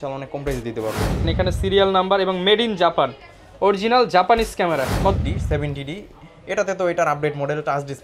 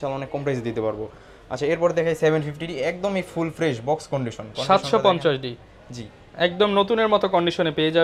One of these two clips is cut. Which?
first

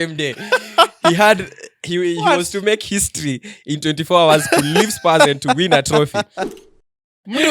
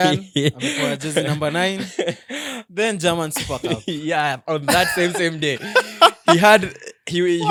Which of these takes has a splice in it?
first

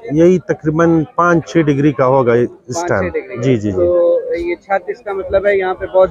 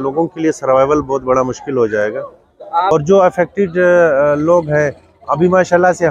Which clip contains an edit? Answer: second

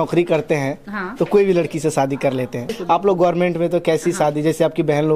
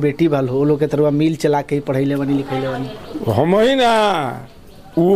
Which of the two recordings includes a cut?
first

